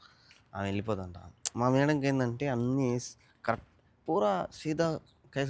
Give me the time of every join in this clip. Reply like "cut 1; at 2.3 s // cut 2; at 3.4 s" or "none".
none